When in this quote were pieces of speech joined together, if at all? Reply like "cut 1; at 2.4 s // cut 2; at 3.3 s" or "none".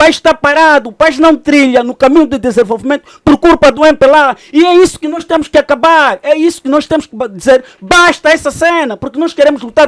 none